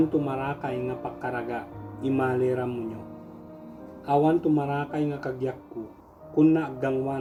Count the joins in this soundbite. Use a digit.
0